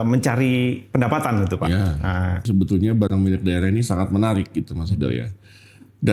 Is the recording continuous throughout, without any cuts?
no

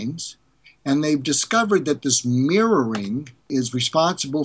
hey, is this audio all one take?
no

